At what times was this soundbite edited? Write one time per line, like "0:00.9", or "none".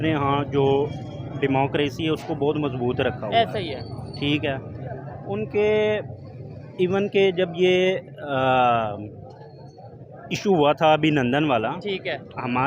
none